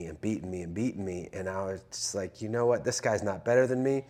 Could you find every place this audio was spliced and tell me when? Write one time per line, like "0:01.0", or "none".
none